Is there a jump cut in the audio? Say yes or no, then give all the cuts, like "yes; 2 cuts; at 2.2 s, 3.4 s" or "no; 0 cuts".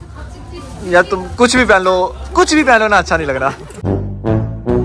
no; 0 cuts